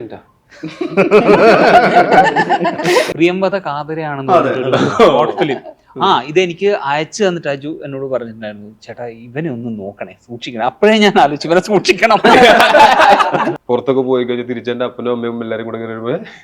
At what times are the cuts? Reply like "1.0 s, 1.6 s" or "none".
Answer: 3.1 s, 13.5 s

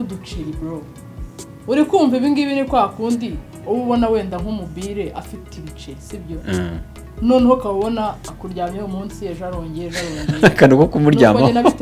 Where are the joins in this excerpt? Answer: none

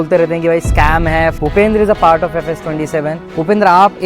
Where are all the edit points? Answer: 1.4 s, 3.2 s

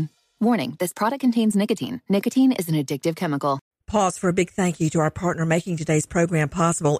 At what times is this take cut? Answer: 3.7 s

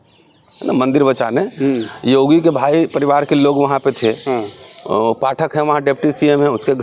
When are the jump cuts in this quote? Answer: none

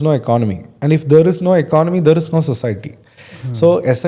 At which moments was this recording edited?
none

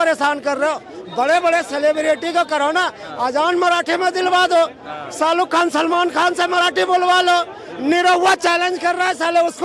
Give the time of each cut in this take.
none

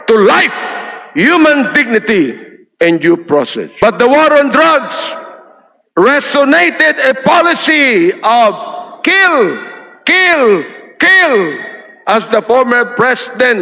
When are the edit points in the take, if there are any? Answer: 3.7 s

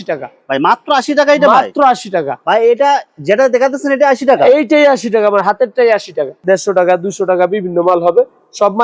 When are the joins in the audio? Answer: 6.4 s

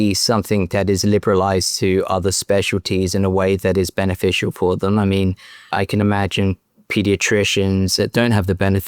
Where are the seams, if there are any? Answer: 8.0 s

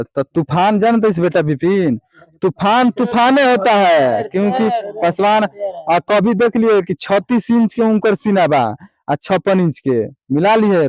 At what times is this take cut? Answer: none

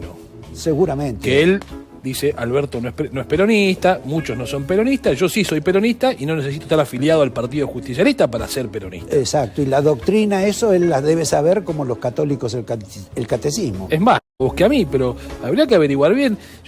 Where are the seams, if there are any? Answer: 14.4 s

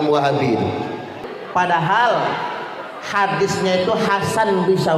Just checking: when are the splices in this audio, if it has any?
1.3 s

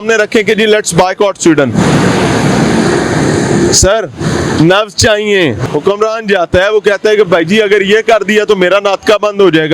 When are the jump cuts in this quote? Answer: 5.6 s

